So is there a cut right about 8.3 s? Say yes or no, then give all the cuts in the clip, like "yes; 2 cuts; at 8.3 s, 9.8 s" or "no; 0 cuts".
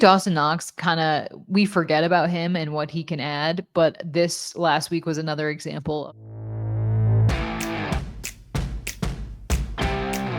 no; 1 cut; at 6.0 s